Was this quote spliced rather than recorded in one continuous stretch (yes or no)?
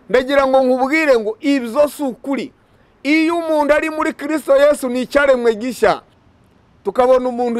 yes